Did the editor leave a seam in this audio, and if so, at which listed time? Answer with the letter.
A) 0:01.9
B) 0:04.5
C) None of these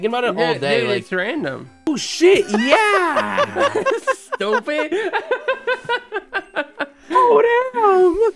A